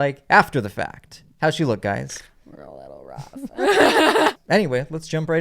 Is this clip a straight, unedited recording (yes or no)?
no